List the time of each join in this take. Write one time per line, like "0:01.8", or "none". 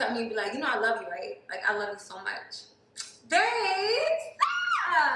0:01.1